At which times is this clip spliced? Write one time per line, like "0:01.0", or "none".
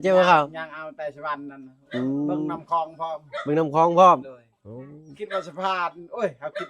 none